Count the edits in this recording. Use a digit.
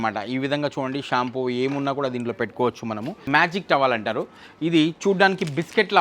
1